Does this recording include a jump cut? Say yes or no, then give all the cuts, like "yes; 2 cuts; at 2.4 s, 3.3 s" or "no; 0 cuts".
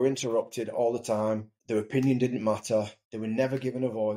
yes; 2 cuts; at 1.5 s, 3.0 s